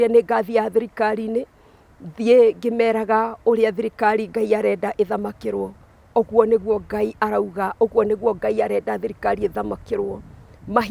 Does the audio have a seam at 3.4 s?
no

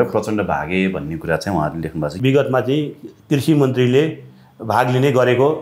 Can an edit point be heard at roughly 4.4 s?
no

